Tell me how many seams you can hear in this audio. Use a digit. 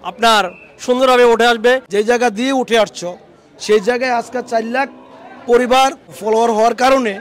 2